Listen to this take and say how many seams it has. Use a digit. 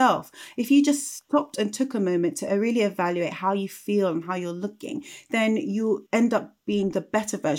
1